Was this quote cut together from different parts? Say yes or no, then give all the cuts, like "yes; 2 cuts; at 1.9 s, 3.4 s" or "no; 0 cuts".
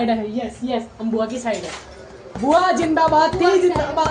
no; 0 cuts